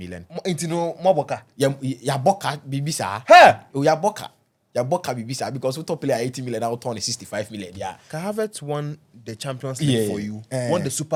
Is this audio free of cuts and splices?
yes; 0 cuts

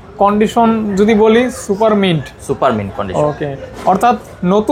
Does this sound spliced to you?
no; 0 cuts

